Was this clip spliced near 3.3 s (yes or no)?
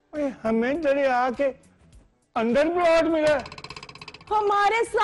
yes